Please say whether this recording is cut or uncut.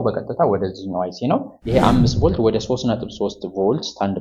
cut